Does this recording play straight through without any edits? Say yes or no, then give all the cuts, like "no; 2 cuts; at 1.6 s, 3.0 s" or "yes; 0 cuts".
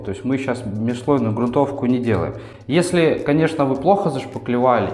yes; 0 cuts